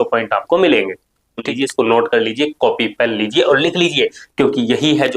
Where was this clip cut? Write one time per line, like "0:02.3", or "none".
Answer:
0:01.4